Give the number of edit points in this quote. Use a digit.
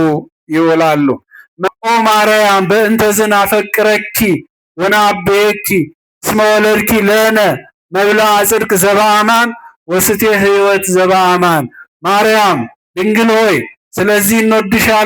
1